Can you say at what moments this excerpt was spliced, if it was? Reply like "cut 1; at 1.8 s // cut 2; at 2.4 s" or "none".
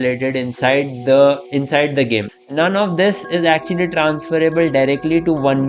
cut 1; at 2.3 s

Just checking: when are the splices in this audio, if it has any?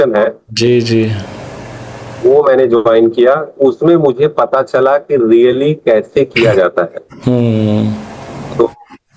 none

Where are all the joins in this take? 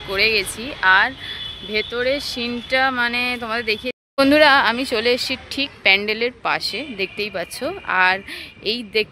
cut 1; at 4.0 s

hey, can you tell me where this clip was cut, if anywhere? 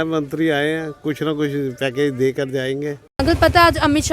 cut 1; at 3.0 s

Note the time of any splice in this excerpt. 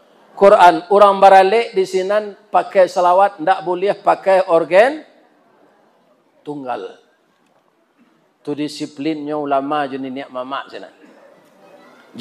none

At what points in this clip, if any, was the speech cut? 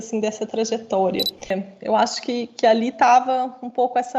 cut 1; at 1.6 s

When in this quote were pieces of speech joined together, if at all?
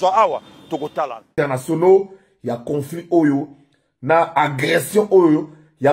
cut 1; at 1.3 s

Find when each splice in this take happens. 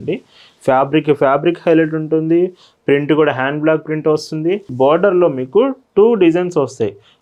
cut 1; at 4.7 s

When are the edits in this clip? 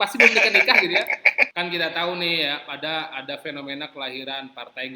cut 1; at 1.4 s

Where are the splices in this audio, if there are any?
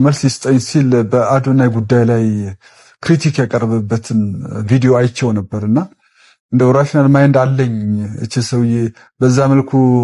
none

